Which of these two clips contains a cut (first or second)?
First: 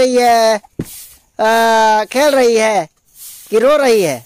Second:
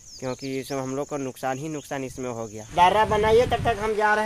second